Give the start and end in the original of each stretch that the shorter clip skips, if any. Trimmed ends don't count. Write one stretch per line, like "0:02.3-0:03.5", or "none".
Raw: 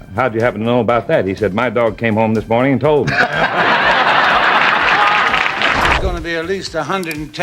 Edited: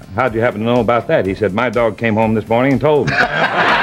none